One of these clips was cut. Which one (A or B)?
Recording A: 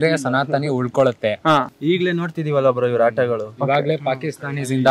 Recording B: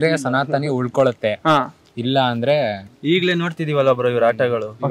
A